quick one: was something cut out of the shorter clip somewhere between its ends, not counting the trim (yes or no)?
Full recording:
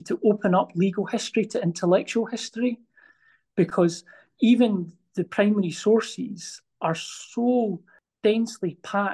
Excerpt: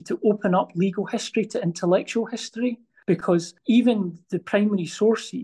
yes